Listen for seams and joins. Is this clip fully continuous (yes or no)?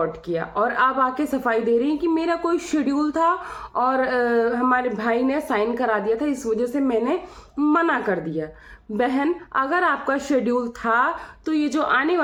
yes